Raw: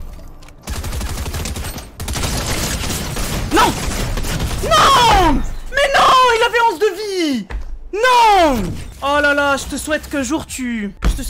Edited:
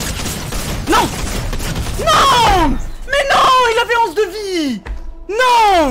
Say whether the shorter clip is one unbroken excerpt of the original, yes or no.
yes